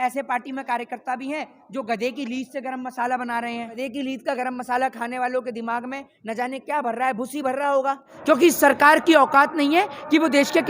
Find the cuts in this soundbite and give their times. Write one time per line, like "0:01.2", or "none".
0:03.8
0:08.1